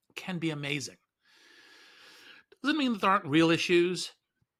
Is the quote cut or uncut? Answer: uncut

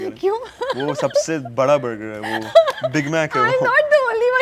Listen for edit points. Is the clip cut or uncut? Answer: uncut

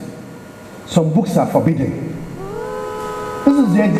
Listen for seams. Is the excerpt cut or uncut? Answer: uncut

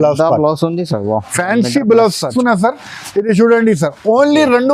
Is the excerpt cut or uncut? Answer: cut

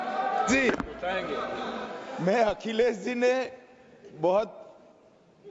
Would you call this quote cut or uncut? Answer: uncut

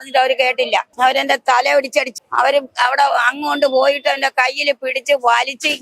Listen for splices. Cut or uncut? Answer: cut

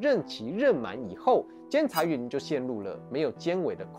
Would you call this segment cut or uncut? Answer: uncut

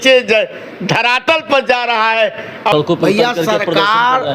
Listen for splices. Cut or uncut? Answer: cut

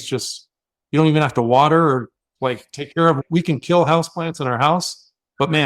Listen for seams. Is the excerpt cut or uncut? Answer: cut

